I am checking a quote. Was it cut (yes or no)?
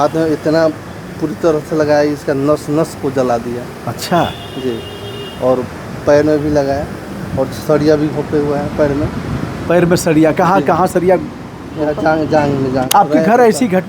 yes